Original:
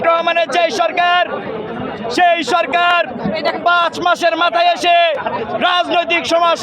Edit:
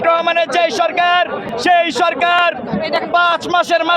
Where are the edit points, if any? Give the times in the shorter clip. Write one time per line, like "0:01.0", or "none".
0:01.5